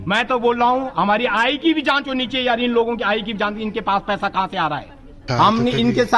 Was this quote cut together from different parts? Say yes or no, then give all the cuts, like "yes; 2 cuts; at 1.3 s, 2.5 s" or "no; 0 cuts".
yes; 1 cut; at 5.2 s